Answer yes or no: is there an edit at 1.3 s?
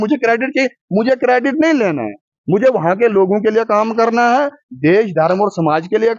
no